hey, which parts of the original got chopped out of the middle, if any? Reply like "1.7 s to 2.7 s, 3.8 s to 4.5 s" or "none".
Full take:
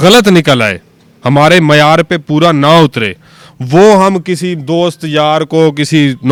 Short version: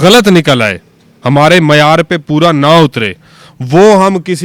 none